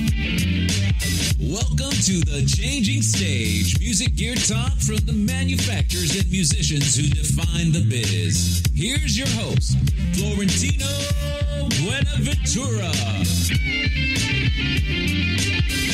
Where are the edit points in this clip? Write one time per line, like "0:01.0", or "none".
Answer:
none